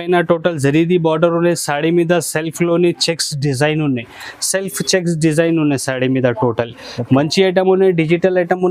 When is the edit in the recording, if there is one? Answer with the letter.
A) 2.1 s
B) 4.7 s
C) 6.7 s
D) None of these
D